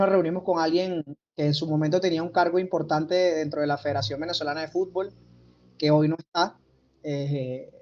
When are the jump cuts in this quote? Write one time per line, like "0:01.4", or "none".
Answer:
none